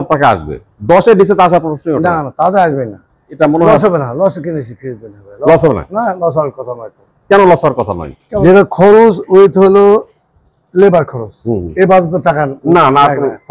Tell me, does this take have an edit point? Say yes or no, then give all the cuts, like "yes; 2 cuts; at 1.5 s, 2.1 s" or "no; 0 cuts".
yes; 2 cuts; at 3.3 s, 8.2 s